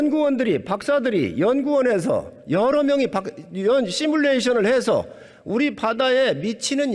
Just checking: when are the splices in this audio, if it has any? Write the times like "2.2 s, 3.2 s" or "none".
none